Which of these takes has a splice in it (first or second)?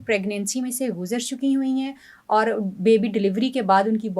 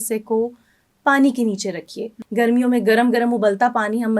second